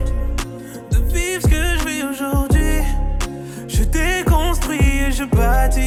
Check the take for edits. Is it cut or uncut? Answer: uncut